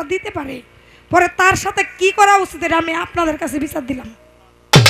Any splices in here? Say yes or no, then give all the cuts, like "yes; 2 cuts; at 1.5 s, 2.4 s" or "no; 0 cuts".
no; 0 cuts